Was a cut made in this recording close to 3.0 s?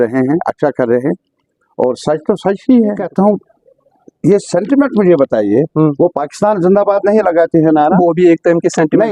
yes; 1 cut; at 3.0 s

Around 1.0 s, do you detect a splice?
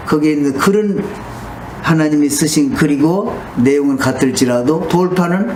no; 0 cuts

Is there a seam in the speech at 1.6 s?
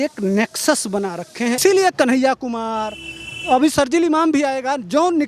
yes; 1 cut; at 1.6 s

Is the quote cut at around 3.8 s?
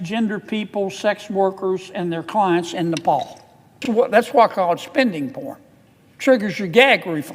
yes; 1 cut; at 3.8 s

